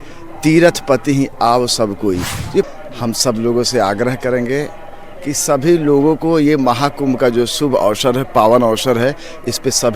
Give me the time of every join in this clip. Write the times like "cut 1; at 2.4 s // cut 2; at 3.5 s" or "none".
cut 1; at 2.7 s